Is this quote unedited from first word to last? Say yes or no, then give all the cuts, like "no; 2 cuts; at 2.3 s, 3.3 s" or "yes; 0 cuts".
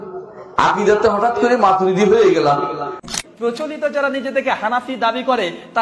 no; 1 cut; at 3.0 s